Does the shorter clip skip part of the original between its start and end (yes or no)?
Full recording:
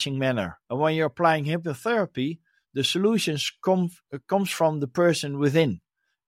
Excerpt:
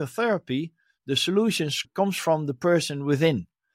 yes